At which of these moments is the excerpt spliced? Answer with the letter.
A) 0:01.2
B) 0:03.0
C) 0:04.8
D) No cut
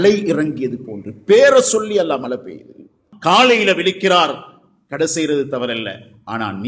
B